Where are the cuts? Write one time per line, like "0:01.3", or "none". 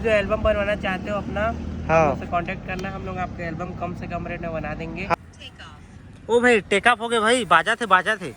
0:05.1